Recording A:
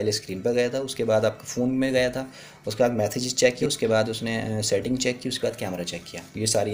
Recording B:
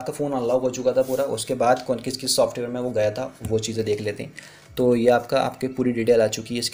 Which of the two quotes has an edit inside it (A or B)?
A